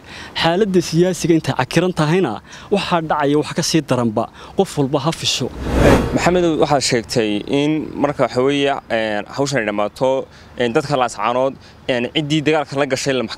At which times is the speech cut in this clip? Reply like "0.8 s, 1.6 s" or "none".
5.7 s